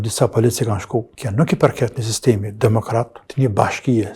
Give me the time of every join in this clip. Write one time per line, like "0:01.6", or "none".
0:01.1
0:03.2